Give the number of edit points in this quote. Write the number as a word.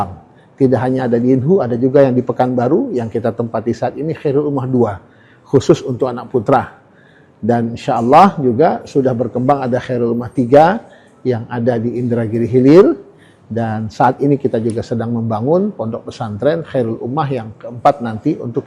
zero